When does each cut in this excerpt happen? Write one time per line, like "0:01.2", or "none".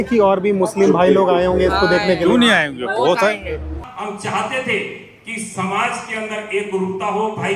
0:03.9